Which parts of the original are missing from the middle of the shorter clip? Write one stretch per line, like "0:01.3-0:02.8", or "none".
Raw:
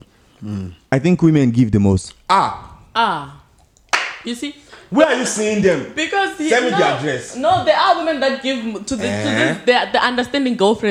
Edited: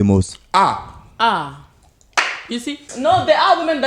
0:04.6-0:07.3

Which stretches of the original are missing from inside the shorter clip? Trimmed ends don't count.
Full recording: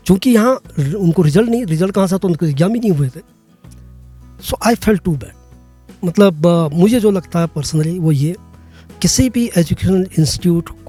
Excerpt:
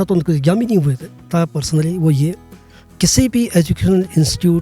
0:03.4-0:07.3

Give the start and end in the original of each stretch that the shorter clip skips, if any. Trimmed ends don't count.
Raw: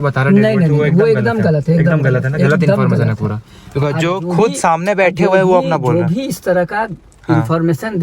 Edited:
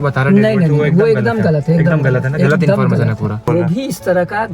0:03.4-0:05.8

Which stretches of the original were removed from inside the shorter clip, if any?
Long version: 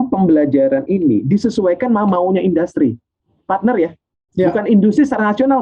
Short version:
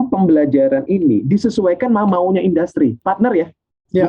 0:03.0-0:03.4

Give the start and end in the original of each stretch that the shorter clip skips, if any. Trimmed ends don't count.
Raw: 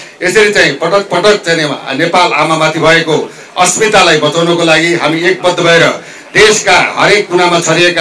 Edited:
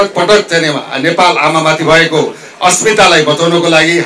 none

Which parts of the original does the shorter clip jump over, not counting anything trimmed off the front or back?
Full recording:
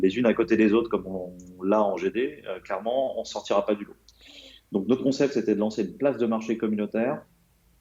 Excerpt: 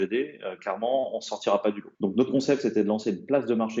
0:03.9-0:04.6

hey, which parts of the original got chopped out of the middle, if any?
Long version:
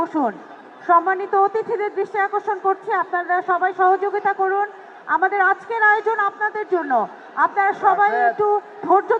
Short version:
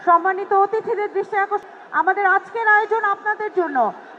0:02.4-0:04.8

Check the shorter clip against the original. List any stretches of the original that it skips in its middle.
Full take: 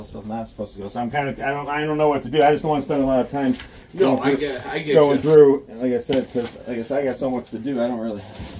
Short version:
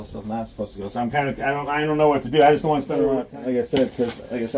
0:03.3-0:05.6

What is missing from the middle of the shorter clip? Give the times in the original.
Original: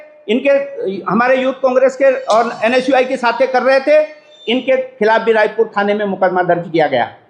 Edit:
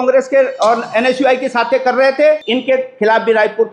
0:04.1-0:04.4

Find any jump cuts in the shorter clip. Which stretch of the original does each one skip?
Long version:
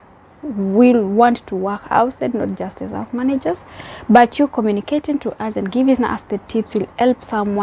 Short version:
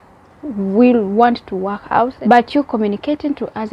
0:02.2-0:04.0

